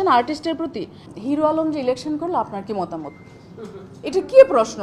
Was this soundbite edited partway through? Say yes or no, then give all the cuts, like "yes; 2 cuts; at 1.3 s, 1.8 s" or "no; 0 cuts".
yes; 1 cut; at 1.0 s